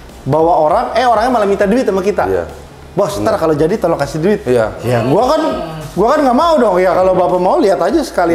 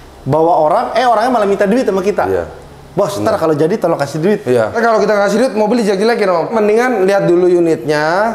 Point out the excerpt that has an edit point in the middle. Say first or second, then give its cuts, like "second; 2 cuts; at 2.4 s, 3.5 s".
second; 2 cuts; at 4.8 s, 6.5 s